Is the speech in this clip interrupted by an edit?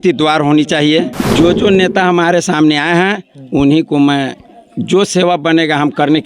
yes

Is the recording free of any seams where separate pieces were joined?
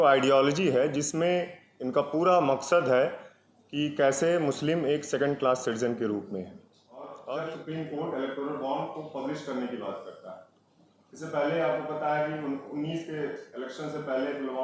no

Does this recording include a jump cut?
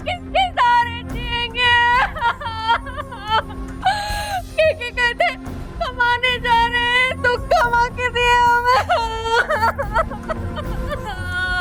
no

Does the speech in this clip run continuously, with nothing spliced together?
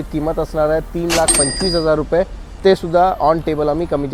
yes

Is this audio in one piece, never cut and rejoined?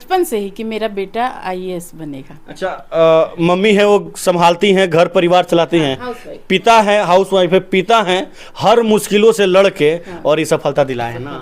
yes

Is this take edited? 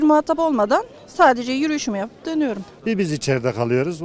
yes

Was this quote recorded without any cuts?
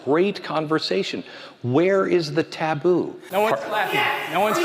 no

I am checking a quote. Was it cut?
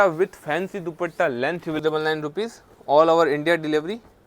yes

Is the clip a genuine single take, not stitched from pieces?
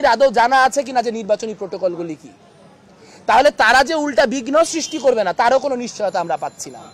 yes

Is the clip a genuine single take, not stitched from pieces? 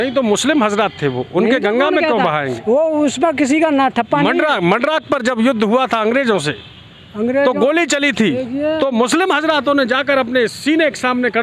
yes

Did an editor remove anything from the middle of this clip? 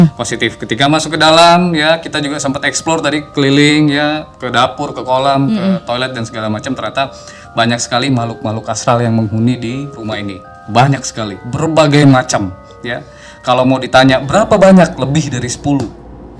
no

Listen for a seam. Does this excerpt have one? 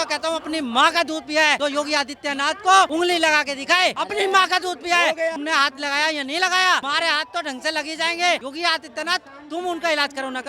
yes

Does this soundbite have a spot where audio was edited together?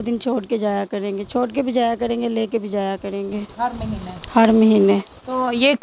no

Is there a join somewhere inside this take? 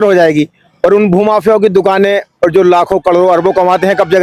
no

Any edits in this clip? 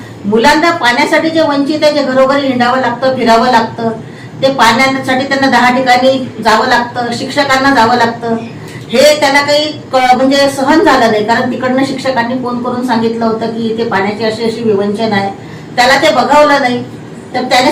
no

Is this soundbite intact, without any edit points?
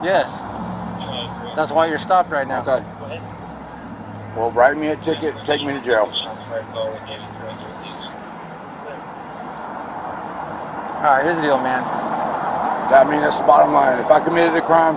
yes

